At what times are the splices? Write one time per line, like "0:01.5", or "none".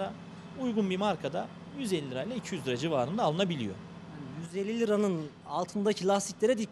none